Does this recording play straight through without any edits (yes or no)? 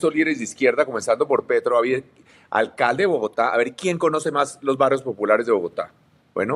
yes